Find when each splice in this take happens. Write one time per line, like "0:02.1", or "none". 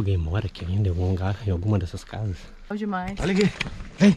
0:02.7